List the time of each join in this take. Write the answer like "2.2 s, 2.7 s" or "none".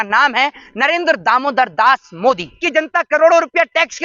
2.6 s